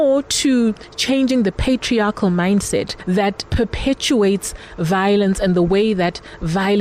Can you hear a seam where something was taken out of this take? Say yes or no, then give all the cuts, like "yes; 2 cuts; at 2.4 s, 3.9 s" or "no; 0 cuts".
no; 0 cuts